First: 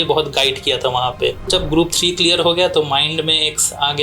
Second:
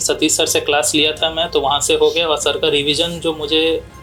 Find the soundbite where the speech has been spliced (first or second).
first